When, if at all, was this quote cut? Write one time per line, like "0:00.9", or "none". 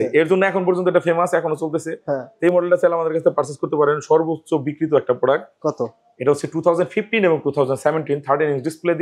none